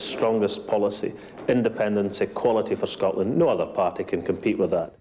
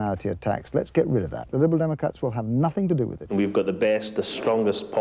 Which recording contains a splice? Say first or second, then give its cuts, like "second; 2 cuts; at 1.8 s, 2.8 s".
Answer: second; 2 cuts; at 1.5 s, 3.3 s